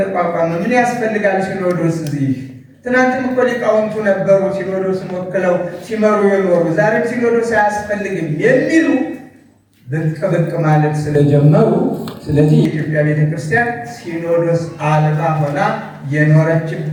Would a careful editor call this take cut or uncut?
uncut